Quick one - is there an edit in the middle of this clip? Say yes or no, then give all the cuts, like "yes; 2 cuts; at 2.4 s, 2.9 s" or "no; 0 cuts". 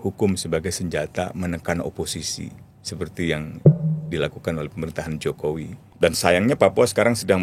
yes; 1 cut; at 5.8 s